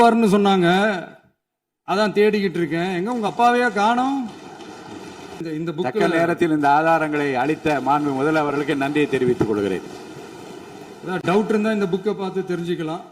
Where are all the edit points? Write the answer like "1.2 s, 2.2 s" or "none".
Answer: 5.5 s